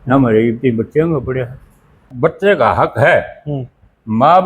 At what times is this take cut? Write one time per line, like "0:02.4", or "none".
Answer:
0:02.0